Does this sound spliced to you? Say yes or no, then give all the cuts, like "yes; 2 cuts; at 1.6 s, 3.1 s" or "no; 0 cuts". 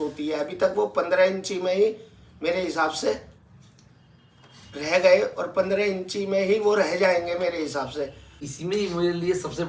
yes; 1 cut; at 8.5 s